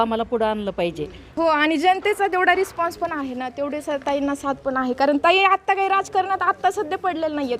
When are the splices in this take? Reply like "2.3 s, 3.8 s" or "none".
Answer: 1.3 s